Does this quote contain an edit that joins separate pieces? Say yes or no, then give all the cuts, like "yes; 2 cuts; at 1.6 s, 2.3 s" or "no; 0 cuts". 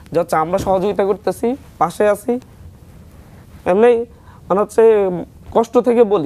no; 0 cuts